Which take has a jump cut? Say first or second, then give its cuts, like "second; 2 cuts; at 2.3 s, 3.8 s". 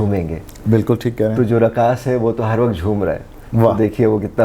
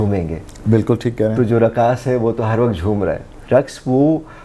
second; 1 cut; at 3.4 s